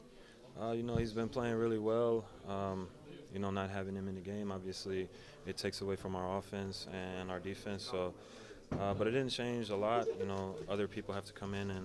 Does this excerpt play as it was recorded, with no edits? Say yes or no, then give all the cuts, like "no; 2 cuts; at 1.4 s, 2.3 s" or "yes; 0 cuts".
yes; 0 cuts